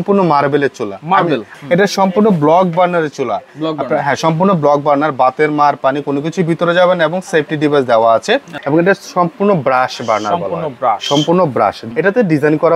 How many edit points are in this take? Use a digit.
3